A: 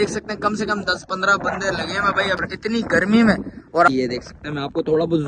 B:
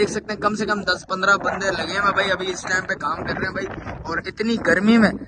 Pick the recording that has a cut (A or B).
A